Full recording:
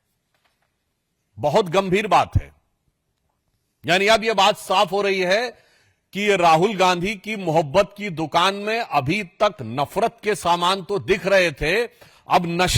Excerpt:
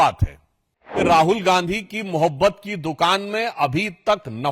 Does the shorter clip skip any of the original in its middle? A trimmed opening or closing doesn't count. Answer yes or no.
yes